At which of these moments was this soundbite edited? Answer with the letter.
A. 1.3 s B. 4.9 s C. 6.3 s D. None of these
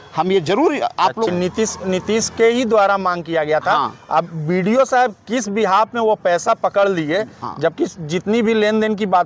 A